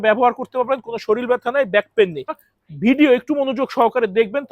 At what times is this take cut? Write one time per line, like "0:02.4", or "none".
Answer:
0:02.4